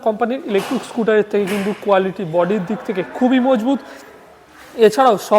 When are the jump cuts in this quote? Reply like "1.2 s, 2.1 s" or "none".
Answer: none